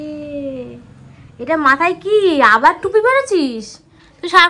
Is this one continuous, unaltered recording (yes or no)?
yes